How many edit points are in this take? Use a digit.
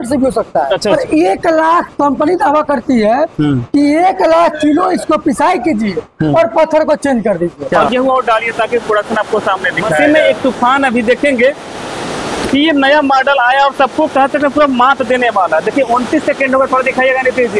3